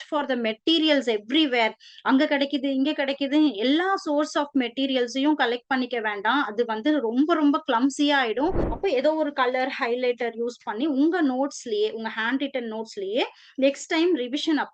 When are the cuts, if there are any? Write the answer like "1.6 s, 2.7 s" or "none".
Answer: 8.7 s